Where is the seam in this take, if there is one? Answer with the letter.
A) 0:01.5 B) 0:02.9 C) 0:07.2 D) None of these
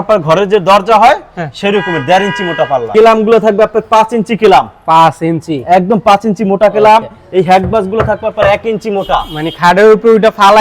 B